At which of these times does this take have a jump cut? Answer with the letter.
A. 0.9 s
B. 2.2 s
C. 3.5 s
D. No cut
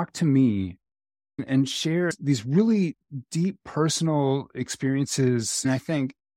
B